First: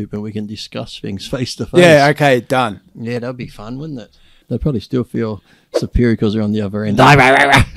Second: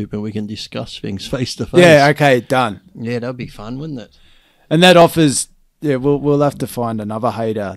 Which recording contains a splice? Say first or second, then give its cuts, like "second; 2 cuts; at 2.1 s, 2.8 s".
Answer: first; 1 cut; at 4.4 s